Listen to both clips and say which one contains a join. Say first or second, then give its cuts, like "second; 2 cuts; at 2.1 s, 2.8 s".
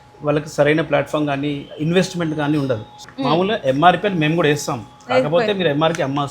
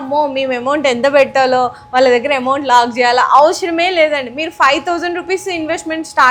first; 1 cut; at 3.0 s